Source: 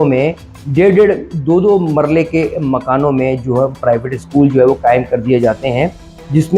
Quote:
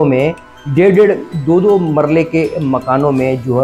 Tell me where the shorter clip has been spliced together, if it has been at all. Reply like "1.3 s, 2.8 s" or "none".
none